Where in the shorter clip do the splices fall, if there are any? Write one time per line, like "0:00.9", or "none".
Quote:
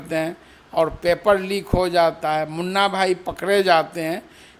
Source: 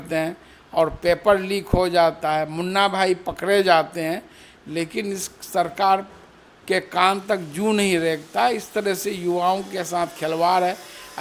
none